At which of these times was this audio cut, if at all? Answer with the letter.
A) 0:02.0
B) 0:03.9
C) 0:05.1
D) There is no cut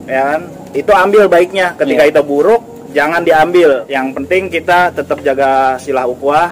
B